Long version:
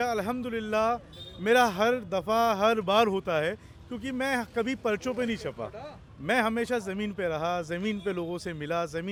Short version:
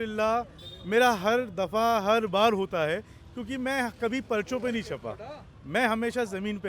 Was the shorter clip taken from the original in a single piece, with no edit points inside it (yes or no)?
yes